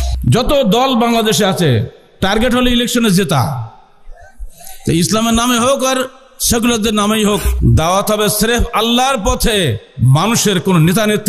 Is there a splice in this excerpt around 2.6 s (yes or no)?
no